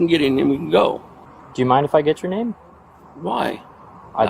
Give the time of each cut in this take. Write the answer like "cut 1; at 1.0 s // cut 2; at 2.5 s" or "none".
cut 1; at 1.2 s

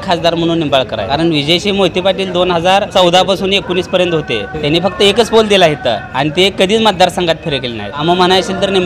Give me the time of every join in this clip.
cut 1; at 1.0 s // cut 2; at 2.9 s // cut 3; at 4.5 s // cut 4; at 6.1 s // cut 5; at 8.0 s

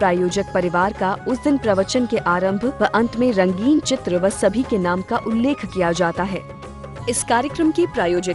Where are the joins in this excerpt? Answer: cut 1; at 6.4 s

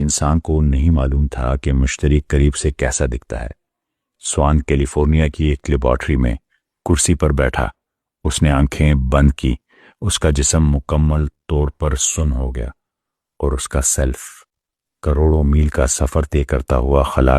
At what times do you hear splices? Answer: cut 1; at 16.1 s

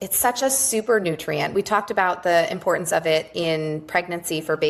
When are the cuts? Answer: none

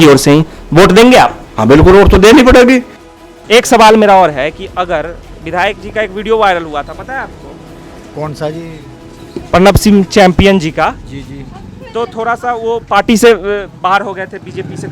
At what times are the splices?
cut 1; at 3.0 s

